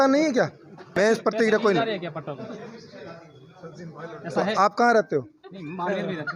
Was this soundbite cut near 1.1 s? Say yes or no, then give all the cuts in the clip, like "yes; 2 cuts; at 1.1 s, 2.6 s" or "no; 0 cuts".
yes; 1 cut; at 1.1 s